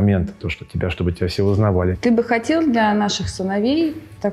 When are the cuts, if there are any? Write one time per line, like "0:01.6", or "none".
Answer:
0:02.0